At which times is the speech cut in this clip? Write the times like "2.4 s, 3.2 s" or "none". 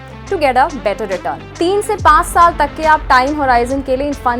1.6 s